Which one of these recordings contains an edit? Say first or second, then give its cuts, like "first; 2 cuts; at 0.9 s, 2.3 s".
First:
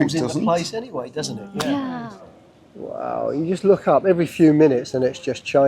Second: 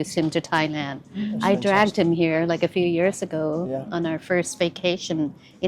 first; 1 cut; at 2.1 s